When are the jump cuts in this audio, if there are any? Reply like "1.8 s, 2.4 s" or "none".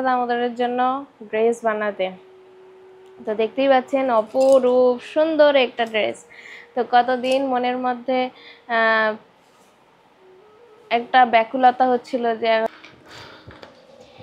12.7 s